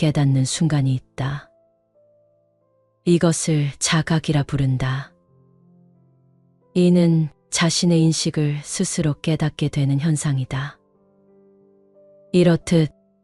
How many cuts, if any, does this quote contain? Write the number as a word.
two